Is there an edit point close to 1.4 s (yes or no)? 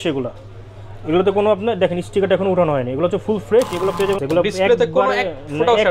no